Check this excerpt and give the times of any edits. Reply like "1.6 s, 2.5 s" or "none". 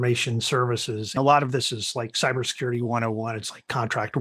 1.2 s